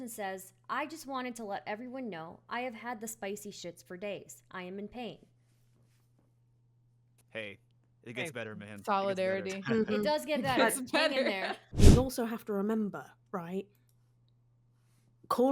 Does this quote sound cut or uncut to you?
cut